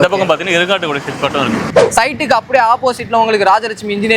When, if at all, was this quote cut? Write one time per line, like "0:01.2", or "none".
0:01.7